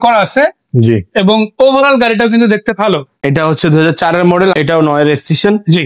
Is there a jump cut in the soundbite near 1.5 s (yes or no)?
no